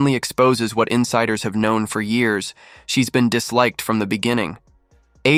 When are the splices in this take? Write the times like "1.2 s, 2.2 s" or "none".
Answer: none